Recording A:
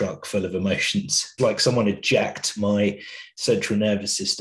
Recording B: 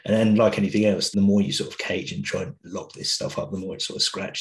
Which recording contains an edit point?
A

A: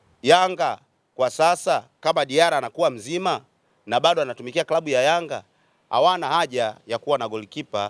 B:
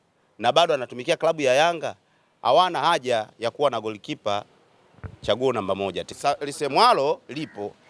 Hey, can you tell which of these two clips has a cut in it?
B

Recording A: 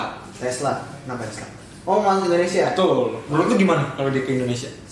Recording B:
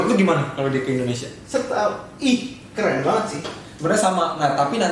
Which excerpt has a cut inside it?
B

